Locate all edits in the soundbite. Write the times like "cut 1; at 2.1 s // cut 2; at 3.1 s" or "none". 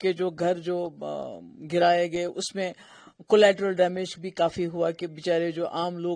none